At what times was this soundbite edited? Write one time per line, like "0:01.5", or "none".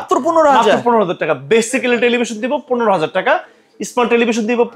none